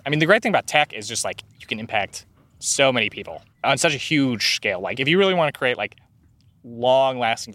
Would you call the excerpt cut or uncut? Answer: cut